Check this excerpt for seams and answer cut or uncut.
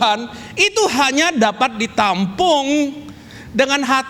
uncut